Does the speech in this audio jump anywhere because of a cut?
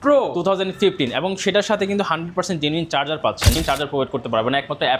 yes; 1 cut; at 3.6 s

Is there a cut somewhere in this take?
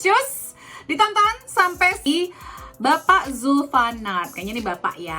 yes; 1 cut; at 2.0 s

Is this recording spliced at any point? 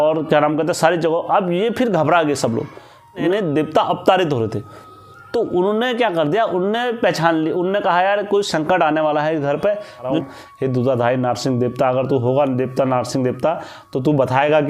yes; 2 cuts; at 3.2 s, 10.1 s

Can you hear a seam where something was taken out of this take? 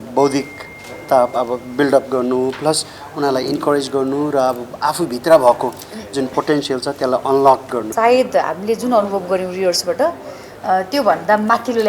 yes; 1 cut; at 7.9 s

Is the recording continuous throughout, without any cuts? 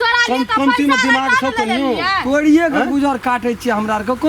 yes; 0 cuts

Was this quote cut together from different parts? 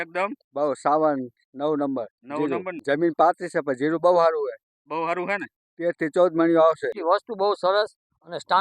yes; 2 cuts; at 2.7 s, 7.0 s

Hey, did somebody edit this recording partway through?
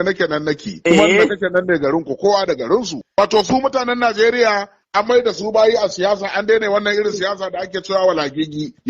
yes; 1 cut; at 3.2 s

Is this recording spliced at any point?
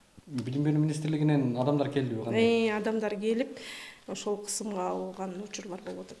no; 0 cuts

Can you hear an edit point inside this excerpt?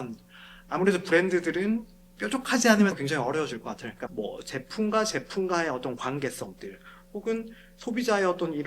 yes; 1 cut; at 4.0 s

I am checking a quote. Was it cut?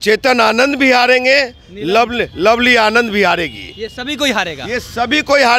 no; 0 cuts

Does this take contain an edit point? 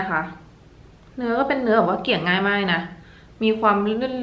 no; 0 cuts

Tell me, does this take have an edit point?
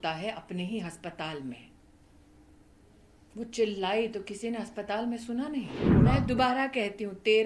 yes; 1 cut; at 5.9 s

